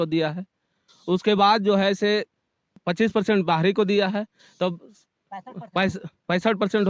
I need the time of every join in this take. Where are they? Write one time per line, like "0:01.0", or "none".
0:02.7